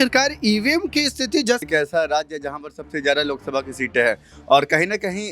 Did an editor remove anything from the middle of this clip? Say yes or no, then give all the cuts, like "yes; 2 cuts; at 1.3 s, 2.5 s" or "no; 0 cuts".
yes; 1 cut; at 1.6 s